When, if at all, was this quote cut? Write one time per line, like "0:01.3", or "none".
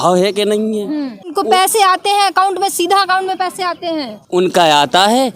0:01.3
0:04.2